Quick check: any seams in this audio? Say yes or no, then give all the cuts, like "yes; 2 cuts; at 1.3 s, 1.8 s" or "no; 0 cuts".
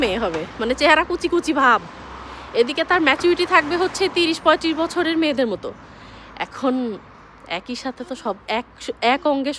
no; 0 cuts